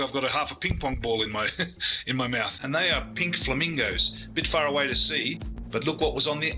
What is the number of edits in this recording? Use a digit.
2